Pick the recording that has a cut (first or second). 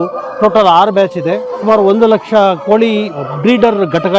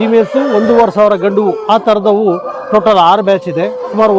first